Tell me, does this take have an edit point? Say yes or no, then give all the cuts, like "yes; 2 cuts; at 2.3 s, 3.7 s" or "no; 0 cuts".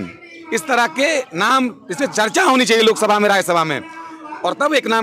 no; 0 cuts